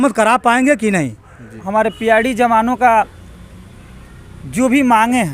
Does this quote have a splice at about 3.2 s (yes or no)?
no